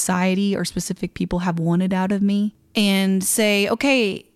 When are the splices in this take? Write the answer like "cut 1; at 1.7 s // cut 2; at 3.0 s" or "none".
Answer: cut 1; at 2.6 s